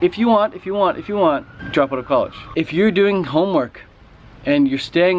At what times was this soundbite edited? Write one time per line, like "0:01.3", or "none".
0:02.4